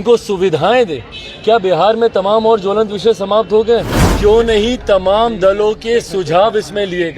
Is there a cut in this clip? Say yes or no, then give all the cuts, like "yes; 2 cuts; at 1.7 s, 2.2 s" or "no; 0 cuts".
yes; 1 cut; at 4.0 s